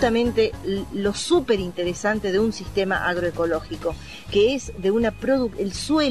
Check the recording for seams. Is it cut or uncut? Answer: uncut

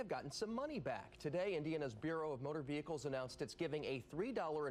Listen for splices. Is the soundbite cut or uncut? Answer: uncut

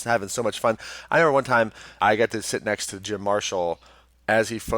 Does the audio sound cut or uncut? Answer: cut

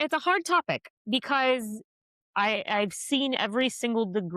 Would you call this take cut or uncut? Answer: uncut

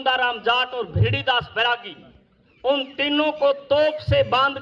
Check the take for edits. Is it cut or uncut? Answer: uncut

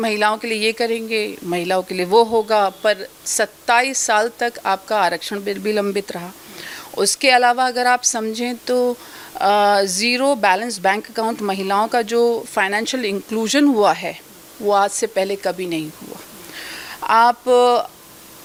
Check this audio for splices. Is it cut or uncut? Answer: uncut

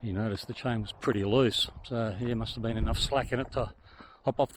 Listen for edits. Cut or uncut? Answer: uncut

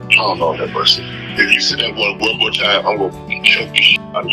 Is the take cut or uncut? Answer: uncut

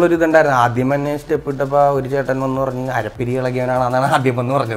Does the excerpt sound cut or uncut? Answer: uncut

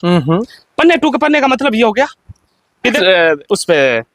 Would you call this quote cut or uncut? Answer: cut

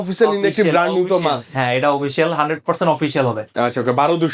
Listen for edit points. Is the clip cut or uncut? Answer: uncut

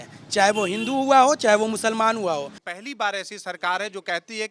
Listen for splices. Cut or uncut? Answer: cut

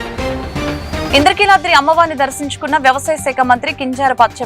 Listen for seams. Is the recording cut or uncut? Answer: uncut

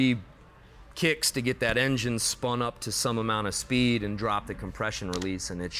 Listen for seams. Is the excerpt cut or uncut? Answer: uncut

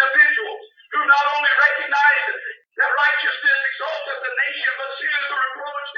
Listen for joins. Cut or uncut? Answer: uncut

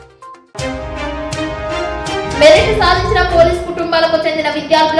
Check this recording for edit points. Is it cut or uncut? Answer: cut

